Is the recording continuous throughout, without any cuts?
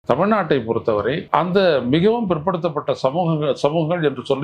no; 1 cut; at 1.2 s

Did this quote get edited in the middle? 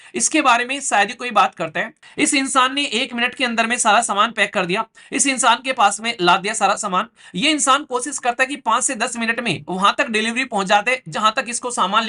yes; 1 cut; at 2.0 s

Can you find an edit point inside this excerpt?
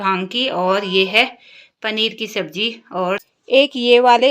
yes; 1 cut; at 3.2 s

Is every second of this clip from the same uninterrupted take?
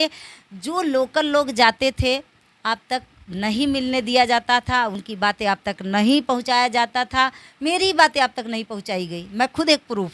yes; 0 cuts

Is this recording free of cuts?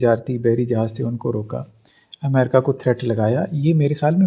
yes; 0 cuts

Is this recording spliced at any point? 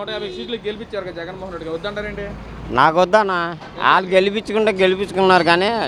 no; 0 cuts

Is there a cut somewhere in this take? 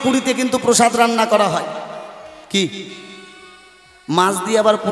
no; 0 cuts

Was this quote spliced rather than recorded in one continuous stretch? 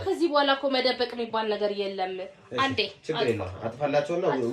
no; 0 cuts

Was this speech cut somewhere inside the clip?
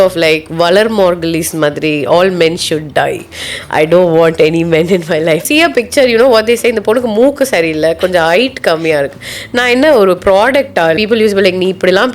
yes; 2 cuts; at 5.4 s, 11.0 s

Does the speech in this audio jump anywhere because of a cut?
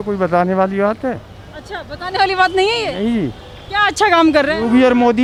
no; 0 cuts

